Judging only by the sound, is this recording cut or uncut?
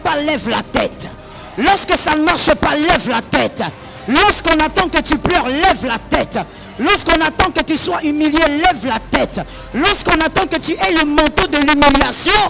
uncut